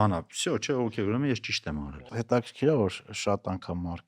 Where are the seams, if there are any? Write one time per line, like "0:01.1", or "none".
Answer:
0:02.0